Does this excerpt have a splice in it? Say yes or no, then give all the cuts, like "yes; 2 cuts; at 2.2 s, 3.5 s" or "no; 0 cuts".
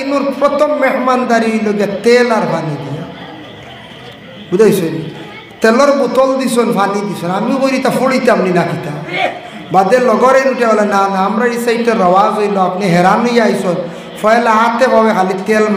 no; 0 cuts